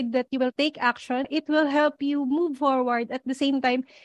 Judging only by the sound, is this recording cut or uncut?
cut